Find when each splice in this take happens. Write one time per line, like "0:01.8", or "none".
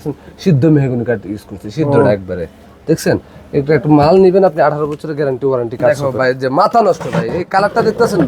0:05.9